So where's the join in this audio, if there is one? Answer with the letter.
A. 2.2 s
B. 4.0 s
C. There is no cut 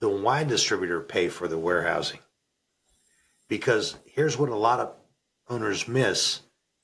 C